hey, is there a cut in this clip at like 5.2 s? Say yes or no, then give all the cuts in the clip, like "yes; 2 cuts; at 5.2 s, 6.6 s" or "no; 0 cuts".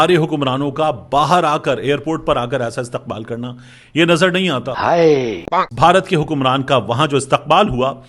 yes; 1 cut; at 5.2 s